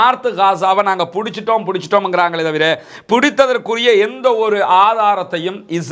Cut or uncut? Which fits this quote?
uncut